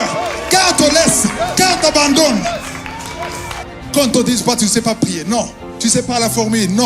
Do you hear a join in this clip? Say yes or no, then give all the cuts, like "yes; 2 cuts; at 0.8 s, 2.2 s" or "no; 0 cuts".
yes; 1 cut; at 3.5 s